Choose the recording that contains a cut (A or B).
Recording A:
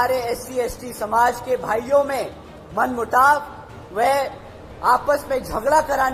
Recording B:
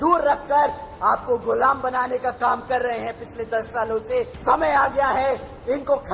B